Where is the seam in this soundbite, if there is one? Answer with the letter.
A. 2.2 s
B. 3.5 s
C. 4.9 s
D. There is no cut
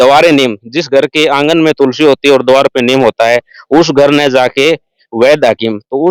D